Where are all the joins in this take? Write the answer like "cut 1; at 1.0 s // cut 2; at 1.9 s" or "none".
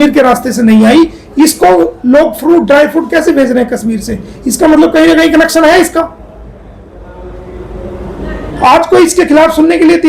none